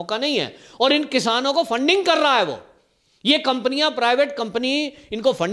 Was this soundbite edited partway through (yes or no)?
no